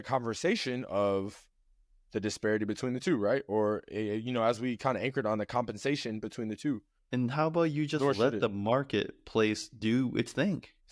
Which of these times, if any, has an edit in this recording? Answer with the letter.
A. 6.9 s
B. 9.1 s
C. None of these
A